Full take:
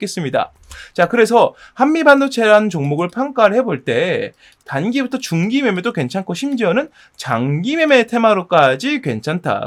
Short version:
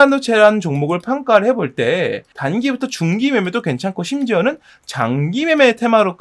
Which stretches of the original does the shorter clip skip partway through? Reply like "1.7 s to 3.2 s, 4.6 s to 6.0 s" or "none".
4.4 s to 4.6 s